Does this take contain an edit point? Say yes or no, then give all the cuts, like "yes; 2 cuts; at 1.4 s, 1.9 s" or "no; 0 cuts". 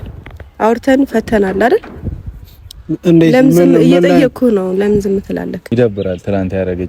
yes; 1 cut; at 5.6 s